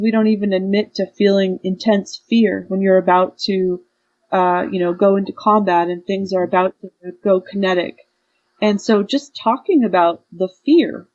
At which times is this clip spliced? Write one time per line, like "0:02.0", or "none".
none